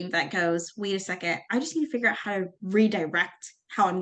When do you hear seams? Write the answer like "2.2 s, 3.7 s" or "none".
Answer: none